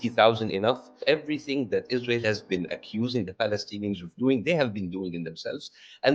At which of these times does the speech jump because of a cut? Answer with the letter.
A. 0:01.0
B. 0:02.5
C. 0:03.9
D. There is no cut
A